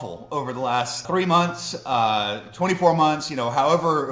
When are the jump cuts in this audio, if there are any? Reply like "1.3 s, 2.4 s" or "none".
1.0 s